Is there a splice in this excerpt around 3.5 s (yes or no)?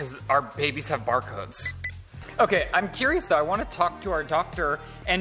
no